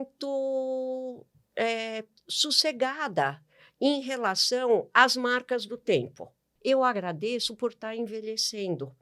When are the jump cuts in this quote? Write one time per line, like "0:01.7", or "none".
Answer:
0:06.4